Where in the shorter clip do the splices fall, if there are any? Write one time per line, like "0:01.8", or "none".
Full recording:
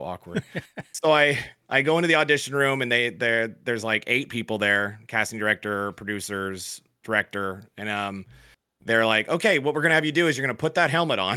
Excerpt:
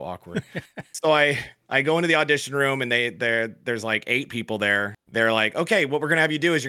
0:05.0